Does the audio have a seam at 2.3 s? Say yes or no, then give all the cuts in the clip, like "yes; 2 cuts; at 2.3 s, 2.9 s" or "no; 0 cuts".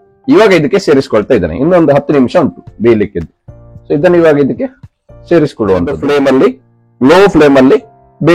no; 1 cut; at 5.9 s